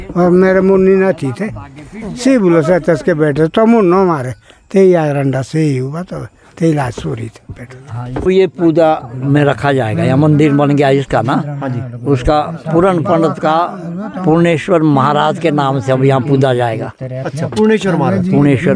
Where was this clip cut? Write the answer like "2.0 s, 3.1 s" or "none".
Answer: 8.2 s